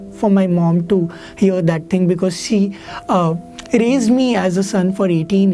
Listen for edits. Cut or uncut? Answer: uncut